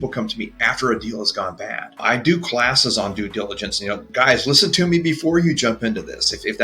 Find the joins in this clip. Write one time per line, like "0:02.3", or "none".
0:02.0
0:04.1